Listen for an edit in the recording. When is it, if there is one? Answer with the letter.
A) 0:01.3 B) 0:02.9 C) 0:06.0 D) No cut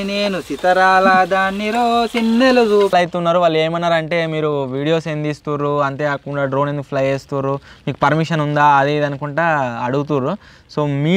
B